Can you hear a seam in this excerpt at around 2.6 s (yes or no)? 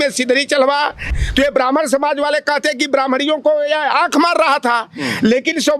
no